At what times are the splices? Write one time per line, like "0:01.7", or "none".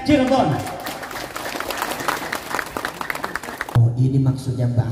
0:03.7